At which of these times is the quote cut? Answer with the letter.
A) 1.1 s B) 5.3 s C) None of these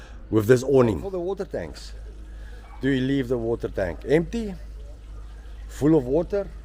A